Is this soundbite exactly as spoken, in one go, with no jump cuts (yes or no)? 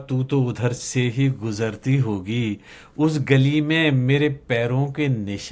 yes